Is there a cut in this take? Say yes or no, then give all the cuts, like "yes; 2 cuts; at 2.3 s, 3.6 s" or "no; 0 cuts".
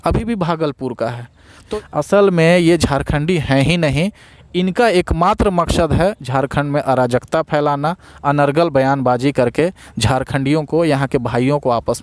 yes; 1 cut; at 1.6 s